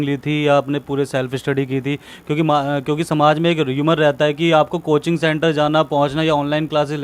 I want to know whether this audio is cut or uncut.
uncut